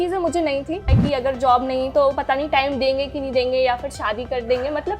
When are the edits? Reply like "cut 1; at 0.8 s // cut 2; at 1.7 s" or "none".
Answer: cut 1; at 0.9 s

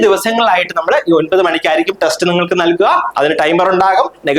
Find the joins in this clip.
none

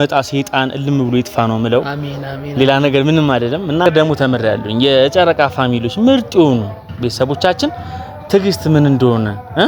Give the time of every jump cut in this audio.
cut 1; at 3.9 s

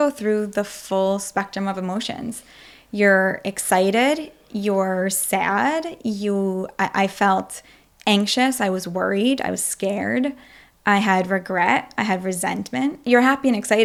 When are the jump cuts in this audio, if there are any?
none

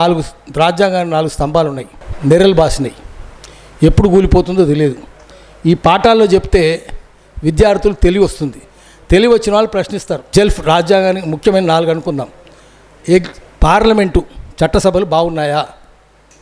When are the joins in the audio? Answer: cut 1; at 1.9 s // cut 2; at 10.2 s

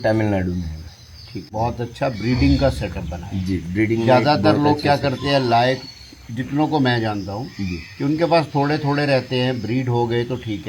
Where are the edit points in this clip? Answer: cut 1; at 1.5 s

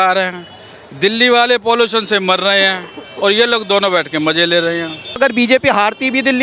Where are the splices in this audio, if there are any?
cut 1; at 5.2 s

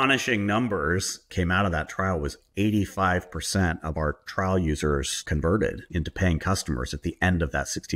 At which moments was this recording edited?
none

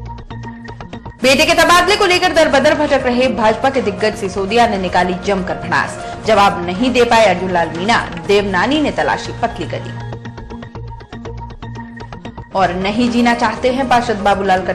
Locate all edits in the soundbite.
cut 1; at 0.9 s

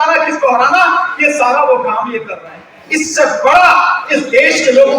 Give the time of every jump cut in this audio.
cut 1; at 2.8 s

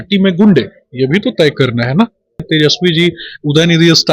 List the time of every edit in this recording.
cut 1; at 2.4 s

